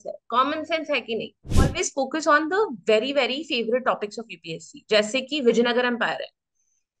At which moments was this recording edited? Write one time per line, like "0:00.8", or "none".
0:01.6